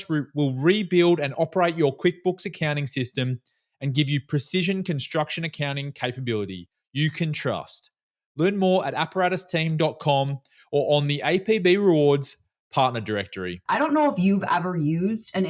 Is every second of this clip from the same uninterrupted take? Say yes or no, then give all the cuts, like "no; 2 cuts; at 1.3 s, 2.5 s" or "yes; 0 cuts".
no; 1 cut; at 13.6 s